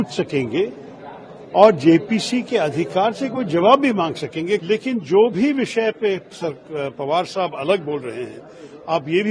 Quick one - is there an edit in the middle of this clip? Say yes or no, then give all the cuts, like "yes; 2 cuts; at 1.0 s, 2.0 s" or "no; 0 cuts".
yes; 1 cut; at 4.6 s